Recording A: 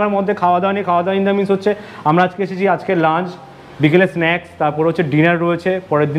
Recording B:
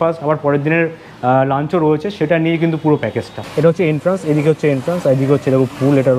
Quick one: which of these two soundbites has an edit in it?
B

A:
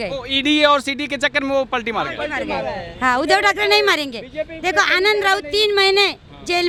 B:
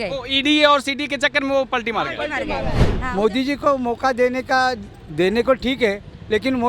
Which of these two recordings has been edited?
B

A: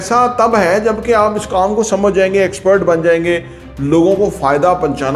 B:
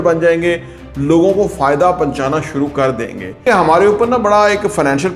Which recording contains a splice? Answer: B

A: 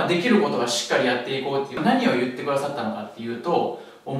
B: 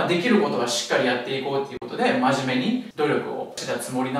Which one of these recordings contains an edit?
A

